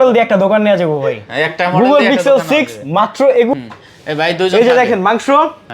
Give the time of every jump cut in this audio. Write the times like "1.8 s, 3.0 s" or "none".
3.5 s